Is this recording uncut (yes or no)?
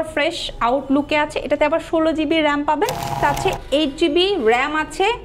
no